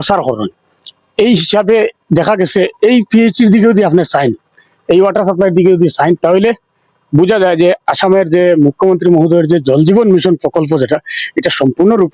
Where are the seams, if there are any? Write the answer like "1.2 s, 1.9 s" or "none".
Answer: none